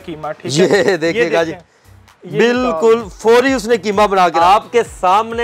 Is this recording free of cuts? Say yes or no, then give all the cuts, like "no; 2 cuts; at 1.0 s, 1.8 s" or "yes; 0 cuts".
no; 1 cut; at 4.3 s